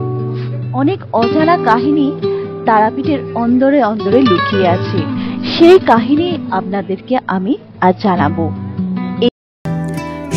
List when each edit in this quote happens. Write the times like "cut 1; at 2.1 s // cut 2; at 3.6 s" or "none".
cut 1; at 9.3 s